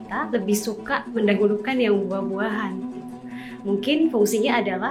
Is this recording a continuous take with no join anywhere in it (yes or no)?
yes